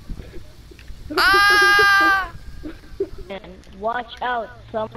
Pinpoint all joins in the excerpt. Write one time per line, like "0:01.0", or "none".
0:03.4